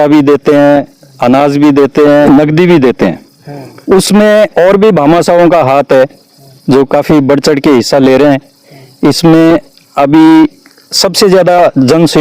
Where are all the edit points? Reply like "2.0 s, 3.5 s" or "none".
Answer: 2.3 s

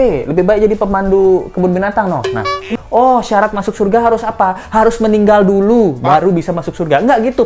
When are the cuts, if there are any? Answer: 2.7 s

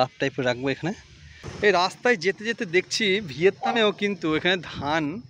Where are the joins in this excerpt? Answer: 1.5 s

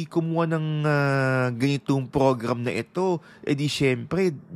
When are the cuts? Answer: none

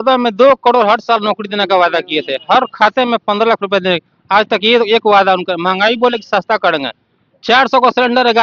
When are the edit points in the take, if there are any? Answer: none

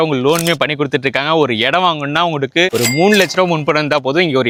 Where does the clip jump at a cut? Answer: none

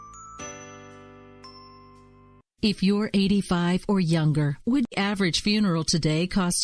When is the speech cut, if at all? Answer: 4.9 s

